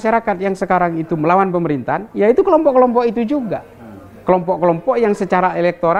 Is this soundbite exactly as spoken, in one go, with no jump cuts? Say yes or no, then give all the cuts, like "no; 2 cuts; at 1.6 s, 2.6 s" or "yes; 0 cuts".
yes; 0 cuts